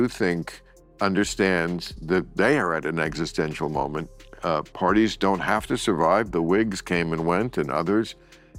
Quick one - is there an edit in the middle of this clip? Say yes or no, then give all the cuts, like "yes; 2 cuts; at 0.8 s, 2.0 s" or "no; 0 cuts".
no; 0 cuts